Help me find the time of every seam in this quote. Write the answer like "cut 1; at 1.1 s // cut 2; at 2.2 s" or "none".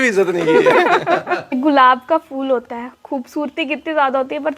cut 1; at 1.6 s